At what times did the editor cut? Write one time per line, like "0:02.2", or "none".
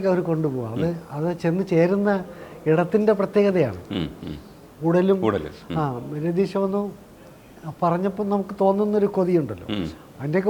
none

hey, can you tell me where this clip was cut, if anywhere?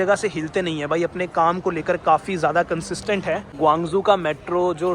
0:03.6

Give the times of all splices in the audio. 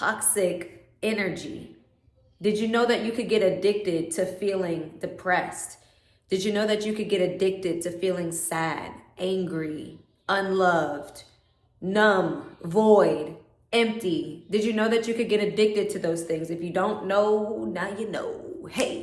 none

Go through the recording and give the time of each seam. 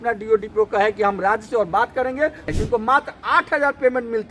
0:02.5

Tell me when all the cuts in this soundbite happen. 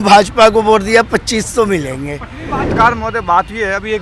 0:02.6

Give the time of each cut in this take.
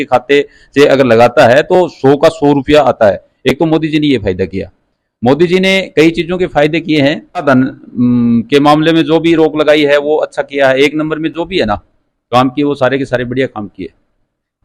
none

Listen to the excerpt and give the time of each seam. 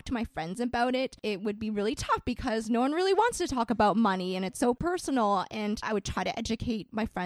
0:01.2
0:04.8
0:05.8

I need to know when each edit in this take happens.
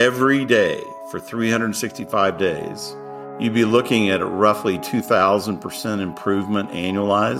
none

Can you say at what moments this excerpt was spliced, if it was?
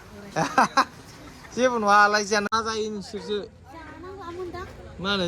0:02.5

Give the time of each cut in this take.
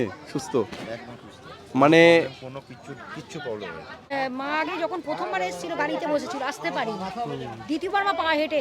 0:04.1

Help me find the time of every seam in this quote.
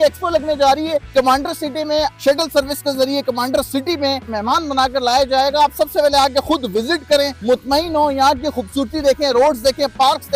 0:01.1
0:02.1
0:04.3
0:07.4

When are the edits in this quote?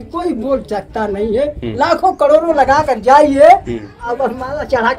none

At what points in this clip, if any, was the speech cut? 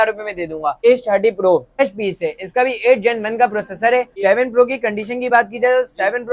0:00.8
0:01.8
0:04.1

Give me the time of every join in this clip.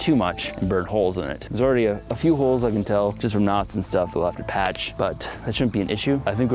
none

